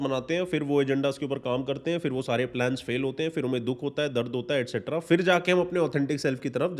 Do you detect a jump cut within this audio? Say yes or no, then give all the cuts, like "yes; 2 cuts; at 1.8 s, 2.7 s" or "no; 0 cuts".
no; 0 cuts